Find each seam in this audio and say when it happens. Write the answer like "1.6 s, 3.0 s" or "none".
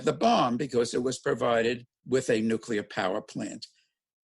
1.9 s